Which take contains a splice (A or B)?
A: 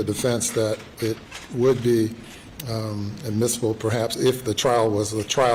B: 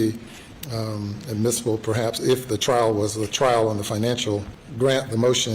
B